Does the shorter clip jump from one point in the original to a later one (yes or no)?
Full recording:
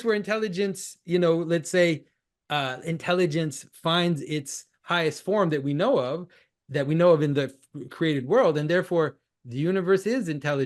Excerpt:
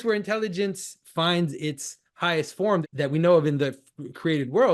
yes